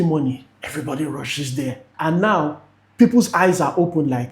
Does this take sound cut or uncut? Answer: cut